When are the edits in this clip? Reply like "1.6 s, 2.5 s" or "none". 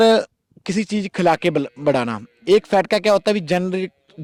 none